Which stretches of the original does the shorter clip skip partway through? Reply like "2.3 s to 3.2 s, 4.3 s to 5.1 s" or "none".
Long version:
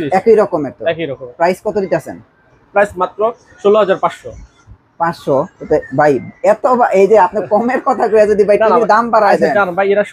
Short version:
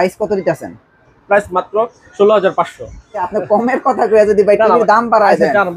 4.7 s to 7.3 s